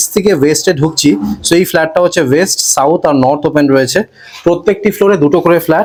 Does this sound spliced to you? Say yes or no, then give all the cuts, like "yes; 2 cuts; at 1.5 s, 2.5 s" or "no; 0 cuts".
no; 0 cuts